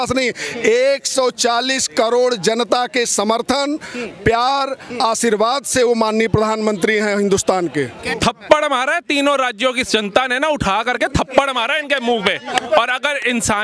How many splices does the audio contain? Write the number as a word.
one